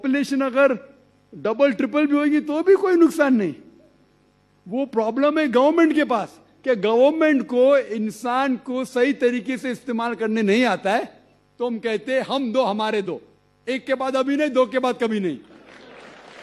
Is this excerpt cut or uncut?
uncut